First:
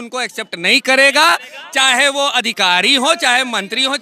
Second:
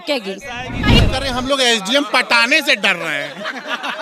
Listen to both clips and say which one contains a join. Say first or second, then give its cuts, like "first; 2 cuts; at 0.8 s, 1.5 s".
second; 1 cut; at 1.0 s